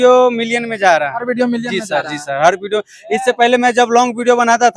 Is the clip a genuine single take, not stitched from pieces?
yes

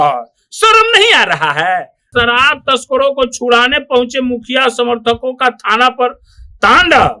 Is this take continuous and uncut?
no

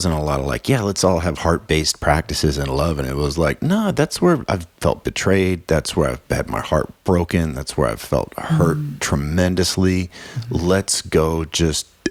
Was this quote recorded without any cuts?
yes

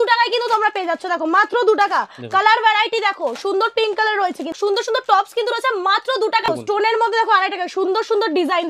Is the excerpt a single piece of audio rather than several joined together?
no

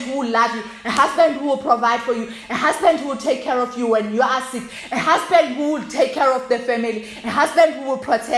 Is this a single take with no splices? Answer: yes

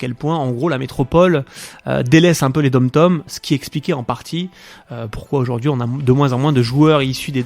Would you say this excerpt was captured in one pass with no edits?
no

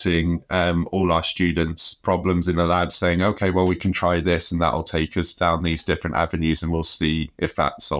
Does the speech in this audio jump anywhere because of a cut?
no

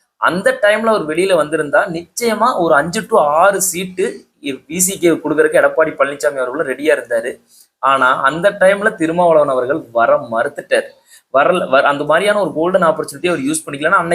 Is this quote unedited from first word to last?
yes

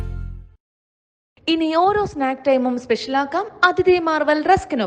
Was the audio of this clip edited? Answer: no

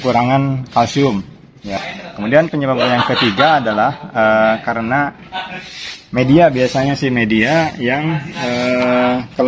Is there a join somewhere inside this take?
yes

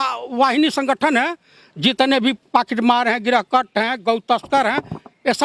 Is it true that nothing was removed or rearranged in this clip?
yes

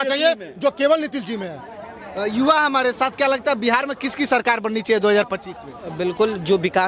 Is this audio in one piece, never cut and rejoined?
yes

